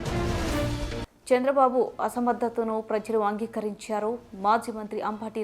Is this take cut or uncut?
cut